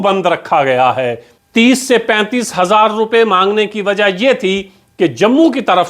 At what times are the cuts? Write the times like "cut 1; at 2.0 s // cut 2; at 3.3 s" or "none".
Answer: cut 1; at 1.3 s

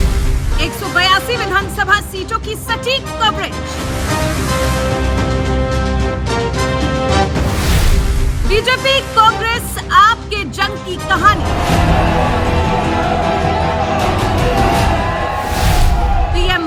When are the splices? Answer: none

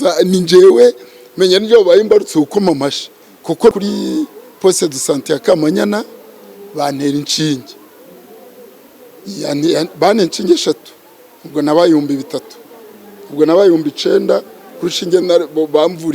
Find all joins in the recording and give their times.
cut 1; at 3.7 s

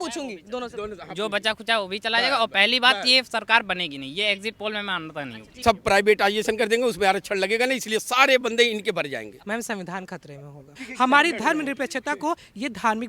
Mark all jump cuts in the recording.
cut 1; at 5.5 s // cut 2; at 9.4 s // cut 3; at 10.8 s

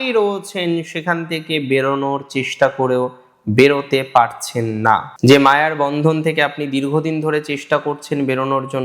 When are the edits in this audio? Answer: cut 1; at 5.1 s

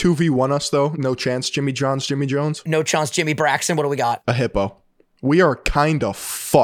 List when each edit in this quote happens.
cut 1; at 0.9 s // cut 2; at 2.6 s // cut 3; at 4.2 s

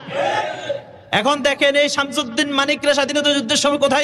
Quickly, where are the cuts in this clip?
none

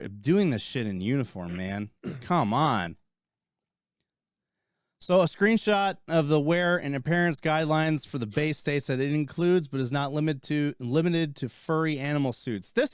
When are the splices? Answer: none

